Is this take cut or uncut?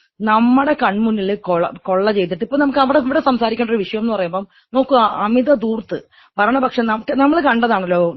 uncut